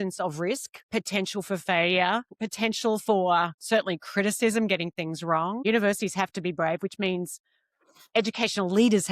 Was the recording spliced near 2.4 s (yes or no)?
yes